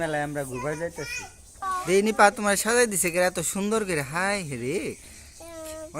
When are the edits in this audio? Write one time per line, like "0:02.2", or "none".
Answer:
0:01.6